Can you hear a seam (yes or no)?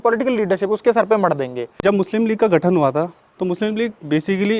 yes